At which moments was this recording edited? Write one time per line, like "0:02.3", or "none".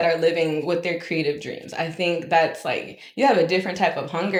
none